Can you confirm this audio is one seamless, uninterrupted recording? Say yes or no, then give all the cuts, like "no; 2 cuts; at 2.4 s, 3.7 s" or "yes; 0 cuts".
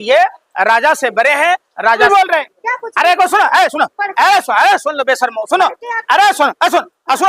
no; 1 cut; at 2.0 s